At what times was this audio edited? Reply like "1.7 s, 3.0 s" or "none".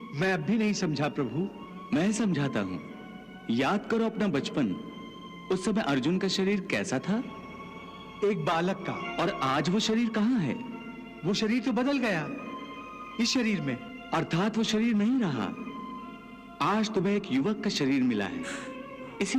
9.0 s